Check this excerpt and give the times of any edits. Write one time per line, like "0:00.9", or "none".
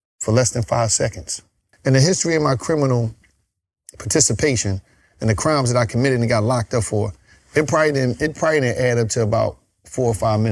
0:01.7